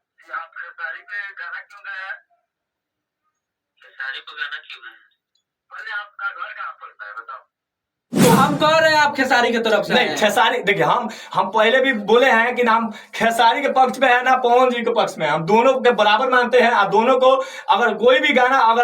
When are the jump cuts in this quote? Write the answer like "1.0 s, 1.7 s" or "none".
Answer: 8.2 s

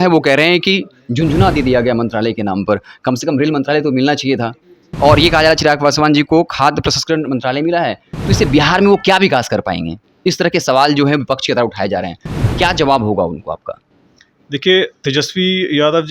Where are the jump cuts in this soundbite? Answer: none

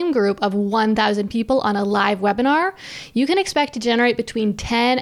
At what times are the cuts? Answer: none

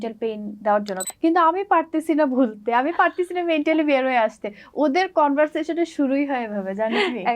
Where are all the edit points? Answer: 0.9 s

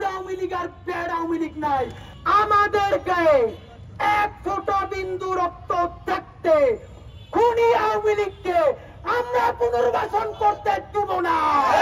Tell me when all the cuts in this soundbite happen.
2.0 s

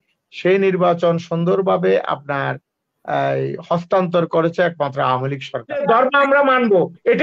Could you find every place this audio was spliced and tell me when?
5.8 s

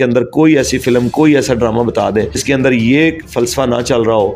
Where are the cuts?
2.4 s

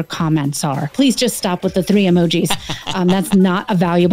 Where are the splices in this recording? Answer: 0.9 s

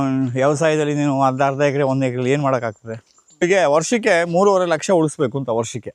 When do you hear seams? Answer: 3.4 s

